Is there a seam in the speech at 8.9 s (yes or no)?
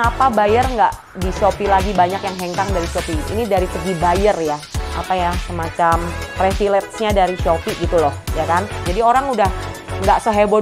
yes